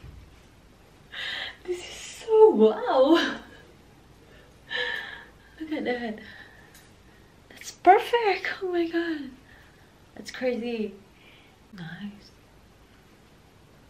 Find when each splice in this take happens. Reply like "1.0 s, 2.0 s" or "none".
11.7 s

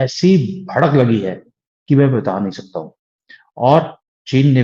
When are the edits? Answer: none

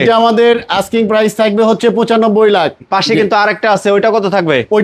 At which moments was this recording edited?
2.8 s

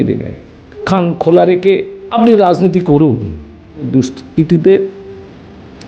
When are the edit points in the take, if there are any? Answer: 0.8 s, 2.0 s, 3.9 s

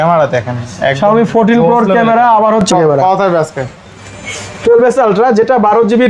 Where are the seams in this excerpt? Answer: 2.7 s

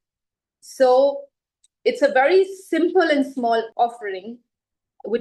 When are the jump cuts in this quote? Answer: 3.7 s

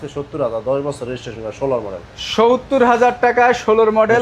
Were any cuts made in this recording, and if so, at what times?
none

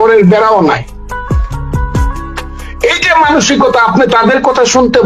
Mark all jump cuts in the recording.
1.5 s, 2.8 s

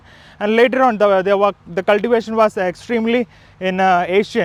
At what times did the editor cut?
none

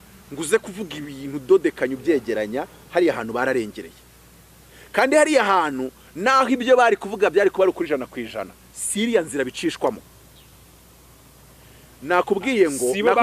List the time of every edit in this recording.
none

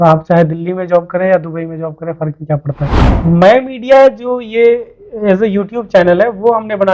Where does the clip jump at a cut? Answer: 3.2 s

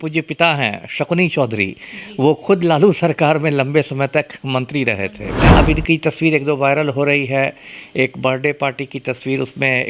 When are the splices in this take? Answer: 5.4 s

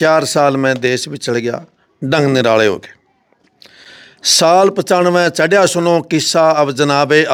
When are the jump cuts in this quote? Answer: none

